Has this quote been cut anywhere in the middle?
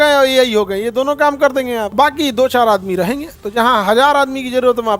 no; 0 cuts

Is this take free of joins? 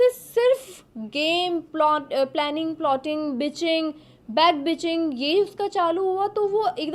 yes; 0 cuts

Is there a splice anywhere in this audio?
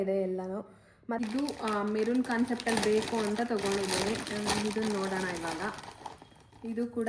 yes; 1 cut; at 1.2 s

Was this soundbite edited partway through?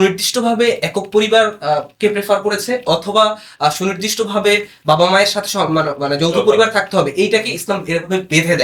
no; 0 cuts

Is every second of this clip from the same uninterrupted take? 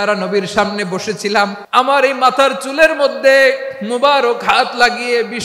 no; 1 cut; at 1.6 s

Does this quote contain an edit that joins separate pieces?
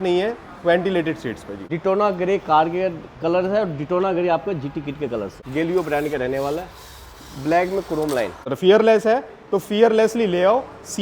yes; 3 cuts; at 1.5 s, 5.4 s, 8.5 s

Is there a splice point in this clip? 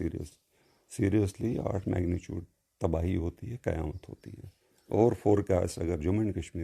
no; 0 cuts

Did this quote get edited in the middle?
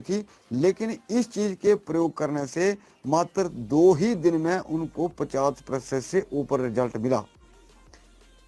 no; 0 cuts

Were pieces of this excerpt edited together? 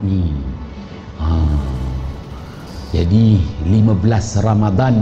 no; 0 cuts

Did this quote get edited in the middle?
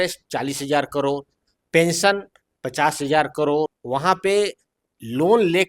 yes; 1 cut; at 3.8 s

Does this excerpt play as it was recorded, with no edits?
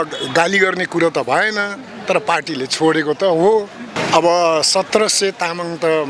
no; 1 cut; at 4.0 s

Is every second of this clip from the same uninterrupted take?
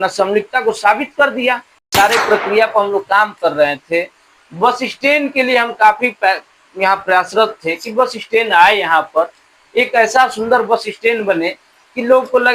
no; 1 cut; at 1.7 s

